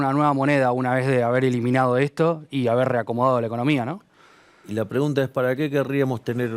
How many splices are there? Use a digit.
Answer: 0